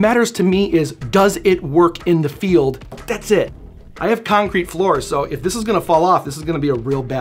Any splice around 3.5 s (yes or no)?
yes